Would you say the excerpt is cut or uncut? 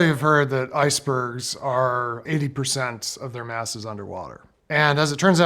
cut